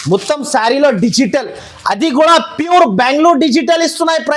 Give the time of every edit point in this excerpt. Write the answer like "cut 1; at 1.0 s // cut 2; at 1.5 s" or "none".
none

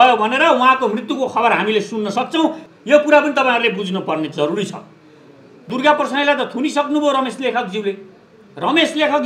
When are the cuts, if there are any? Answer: cut 1; at 2.7 s // cut 2; at 5.7 s

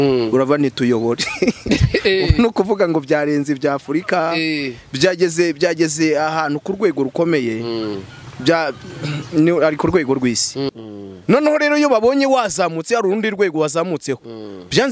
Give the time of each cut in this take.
cut 1; at 10.7 s

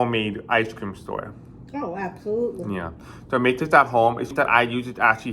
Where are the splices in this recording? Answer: cut 1; at 4.3 s

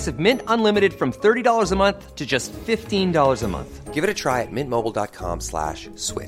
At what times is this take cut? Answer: none

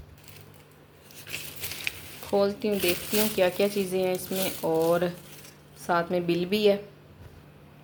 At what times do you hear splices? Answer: none

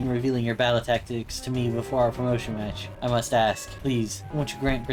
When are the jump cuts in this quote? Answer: none

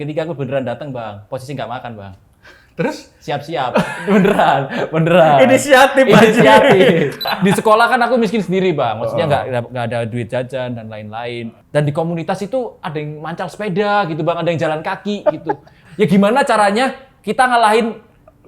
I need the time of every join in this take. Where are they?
cut 1; at 7.3 s // cut 2; at 11.5 s // cut 3; at 15.8 s

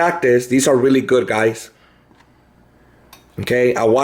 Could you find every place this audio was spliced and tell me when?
none

